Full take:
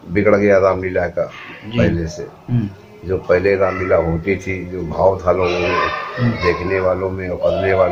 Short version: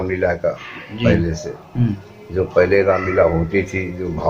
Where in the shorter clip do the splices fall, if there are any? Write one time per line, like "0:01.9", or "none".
none

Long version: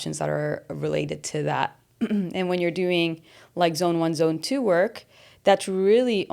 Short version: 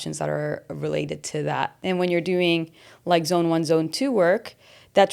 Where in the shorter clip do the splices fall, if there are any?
0:01.8

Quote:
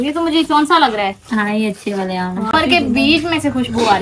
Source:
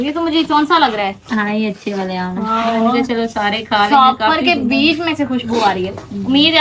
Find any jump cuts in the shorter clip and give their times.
0:02.5

